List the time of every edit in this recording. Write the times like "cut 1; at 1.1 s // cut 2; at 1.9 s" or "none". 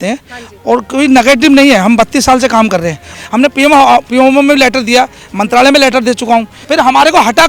cut 1; at 3.0 s // cut 2; at 6.6 s